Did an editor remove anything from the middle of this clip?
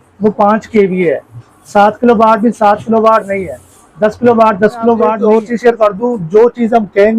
yes; 1 cut; at 5.1 s

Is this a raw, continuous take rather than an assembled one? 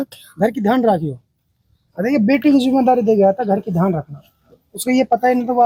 yes; 0 cuts

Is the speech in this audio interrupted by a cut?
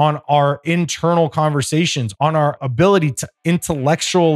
yes; 1 cut; at 2.2 s

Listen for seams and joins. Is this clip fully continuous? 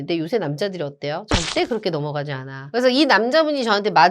no; 1 cut; at 2.5 s

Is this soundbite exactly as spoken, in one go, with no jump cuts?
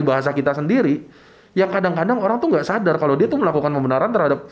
yes; 0 cuts

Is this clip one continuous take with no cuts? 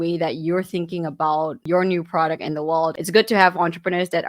no; 1 cut; at 3.0 s

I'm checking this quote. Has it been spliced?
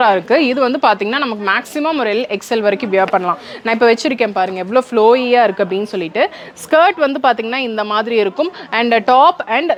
no; 0 cuts

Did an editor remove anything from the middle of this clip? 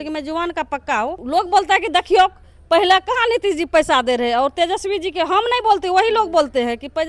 yes; 1 cut; at 1.2 s

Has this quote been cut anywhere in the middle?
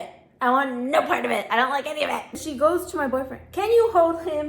yes; 1 cut; at 2.5 s

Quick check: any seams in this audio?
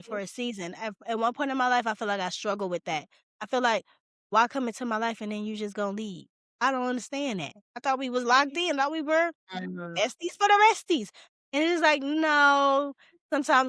no; 0 cuts

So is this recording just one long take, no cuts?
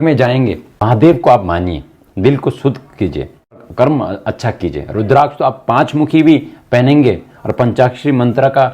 no; 2 cuts; at 0.8 s, 3.6 s

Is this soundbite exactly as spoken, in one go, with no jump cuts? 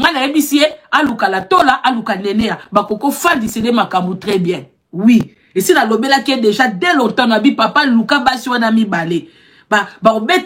yes; 0 cuts

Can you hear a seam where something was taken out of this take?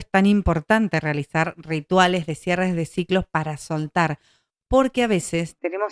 no; 0 cuts

